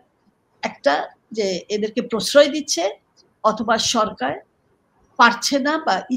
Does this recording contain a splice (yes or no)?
no